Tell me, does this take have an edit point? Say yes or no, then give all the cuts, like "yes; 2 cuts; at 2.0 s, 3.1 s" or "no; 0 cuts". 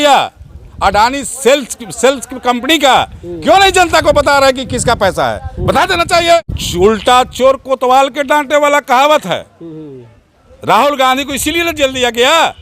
yes; 1 cut; at 6.6 s